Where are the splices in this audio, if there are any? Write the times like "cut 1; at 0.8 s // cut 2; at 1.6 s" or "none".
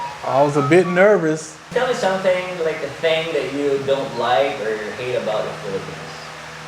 cut 1; at 1.7 s